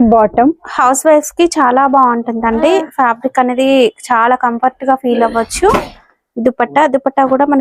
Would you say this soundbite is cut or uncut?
uncut